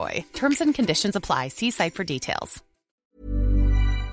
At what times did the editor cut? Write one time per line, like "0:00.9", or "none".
0:03.0